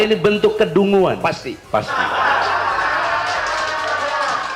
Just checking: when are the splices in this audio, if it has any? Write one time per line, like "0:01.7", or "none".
0:01.5